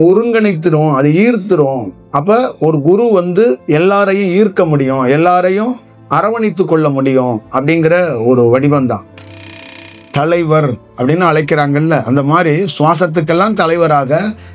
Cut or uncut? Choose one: cut